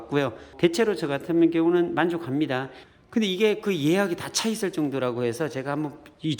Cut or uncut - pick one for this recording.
cut